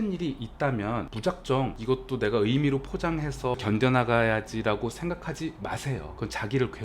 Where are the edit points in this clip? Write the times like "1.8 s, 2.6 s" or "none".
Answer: 1.1 s, 1.8 s, 3.6 s